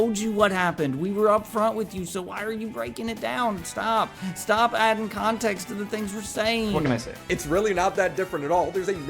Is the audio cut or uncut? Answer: cut